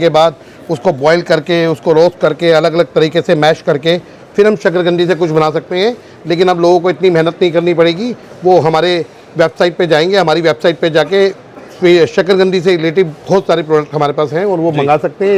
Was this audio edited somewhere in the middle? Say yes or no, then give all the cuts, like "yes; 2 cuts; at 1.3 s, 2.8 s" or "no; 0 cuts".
no; 0 cuts